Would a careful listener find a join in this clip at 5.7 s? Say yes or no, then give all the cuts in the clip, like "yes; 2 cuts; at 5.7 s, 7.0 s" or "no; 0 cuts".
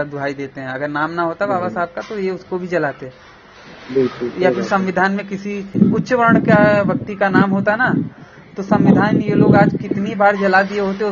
yes; 1 cut; at 5.7 s